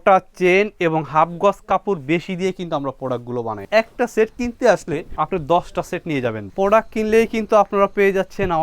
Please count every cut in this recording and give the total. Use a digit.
3